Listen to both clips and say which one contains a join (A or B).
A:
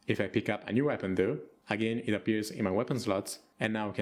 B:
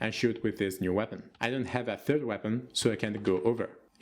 B